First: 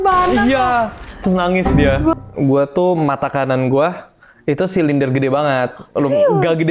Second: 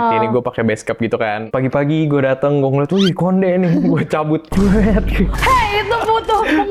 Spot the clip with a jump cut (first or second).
first